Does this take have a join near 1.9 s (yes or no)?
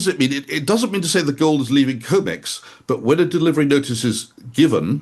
no